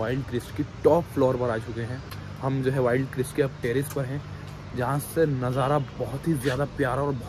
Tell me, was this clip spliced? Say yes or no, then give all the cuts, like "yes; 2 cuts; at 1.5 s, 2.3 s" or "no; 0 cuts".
no; 0 cuts